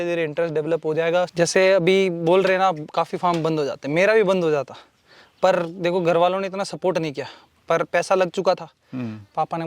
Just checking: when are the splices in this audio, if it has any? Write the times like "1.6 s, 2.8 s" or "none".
1.3 s